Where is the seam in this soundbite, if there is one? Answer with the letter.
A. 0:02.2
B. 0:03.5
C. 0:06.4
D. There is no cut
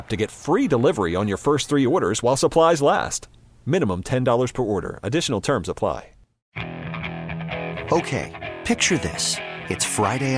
C